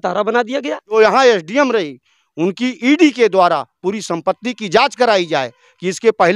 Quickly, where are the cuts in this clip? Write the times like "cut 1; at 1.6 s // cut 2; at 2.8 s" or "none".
cut 1; at 0.9 s